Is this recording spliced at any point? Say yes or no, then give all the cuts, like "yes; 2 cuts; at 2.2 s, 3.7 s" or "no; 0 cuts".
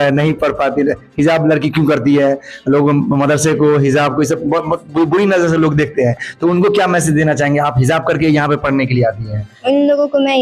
no; 0 cuts